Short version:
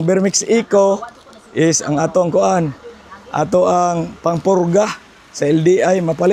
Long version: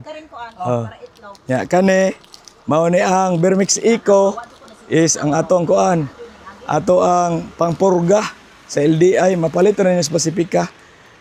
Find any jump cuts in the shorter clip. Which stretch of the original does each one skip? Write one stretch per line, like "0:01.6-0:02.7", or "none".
none